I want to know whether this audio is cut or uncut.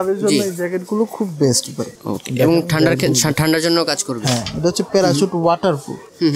uncut